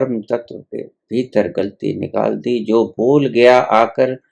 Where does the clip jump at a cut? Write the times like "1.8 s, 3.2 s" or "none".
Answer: none